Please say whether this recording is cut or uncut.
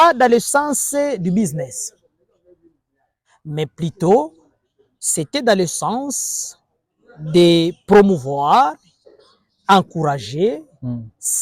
uncut